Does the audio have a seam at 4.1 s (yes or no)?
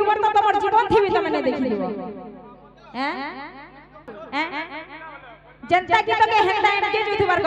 yes